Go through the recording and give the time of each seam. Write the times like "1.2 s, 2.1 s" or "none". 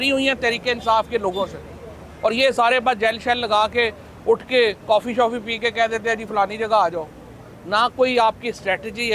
none